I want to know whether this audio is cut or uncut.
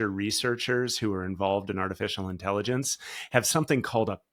uncut